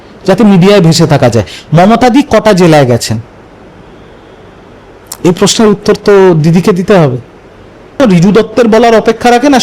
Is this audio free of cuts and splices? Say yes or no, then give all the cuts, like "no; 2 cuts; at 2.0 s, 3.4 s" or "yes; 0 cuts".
no; 1 cut; at 8.0 s